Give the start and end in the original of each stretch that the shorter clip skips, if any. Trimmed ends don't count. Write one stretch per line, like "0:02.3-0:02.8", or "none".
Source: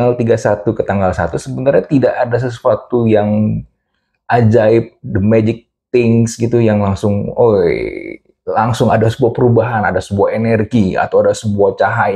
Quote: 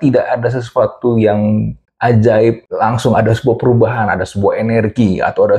0:03.7-0:04.1
0:04.9-0:08.4